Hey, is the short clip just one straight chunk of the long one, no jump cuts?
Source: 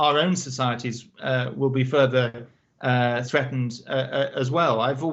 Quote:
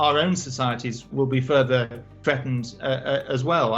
no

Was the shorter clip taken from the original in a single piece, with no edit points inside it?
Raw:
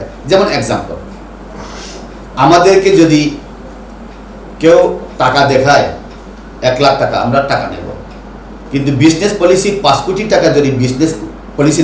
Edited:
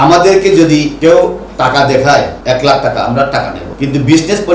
no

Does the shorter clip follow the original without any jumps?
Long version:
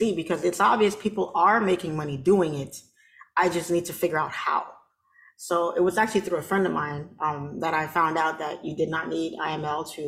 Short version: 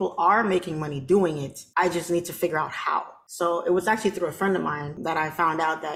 no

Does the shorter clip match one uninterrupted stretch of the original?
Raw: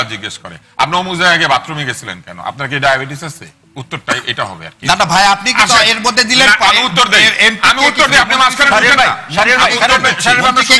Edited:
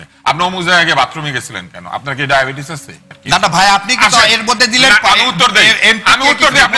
no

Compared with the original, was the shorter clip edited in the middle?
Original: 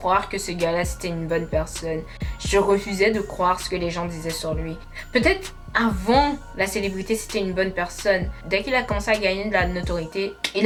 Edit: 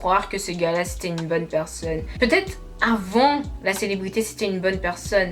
yes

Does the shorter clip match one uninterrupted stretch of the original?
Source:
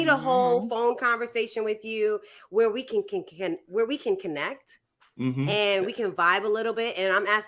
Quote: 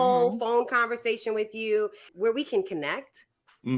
no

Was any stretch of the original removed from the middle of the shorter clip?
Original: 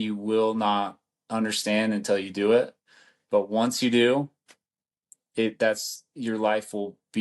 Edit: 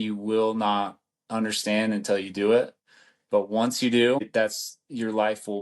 yes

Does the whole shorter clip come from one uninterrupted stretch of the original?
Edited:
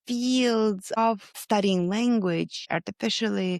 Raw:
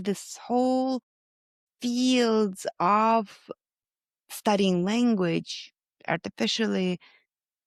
no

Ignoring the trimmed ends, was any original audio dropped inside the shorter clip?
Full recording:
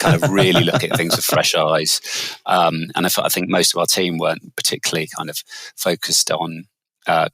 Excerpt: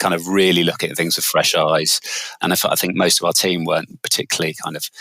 yes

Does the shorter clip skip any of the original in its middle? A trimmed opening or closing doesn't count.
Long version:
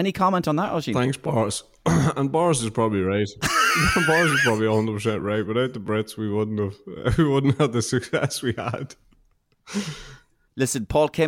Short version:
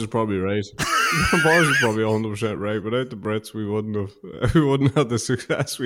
no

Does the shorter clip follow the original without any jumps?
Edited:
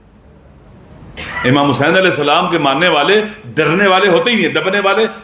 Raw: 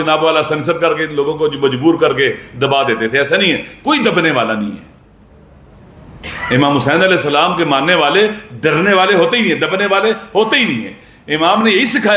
yes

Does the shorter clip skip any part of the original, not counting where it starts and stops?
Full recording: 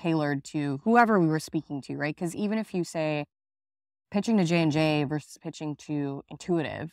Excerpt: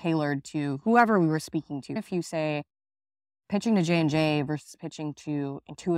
yes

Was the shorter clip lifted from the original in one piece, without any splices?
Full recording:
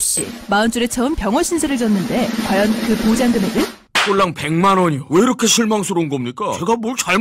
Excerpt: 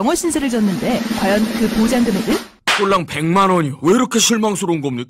yes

